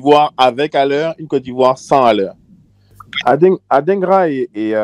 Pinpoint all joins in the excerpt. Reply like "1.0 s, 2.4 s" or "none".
3.1 s